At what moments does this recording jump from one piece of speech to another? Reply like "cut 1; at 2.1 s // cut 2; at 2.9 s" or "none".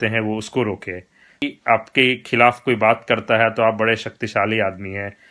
cut 1; at 1.4 s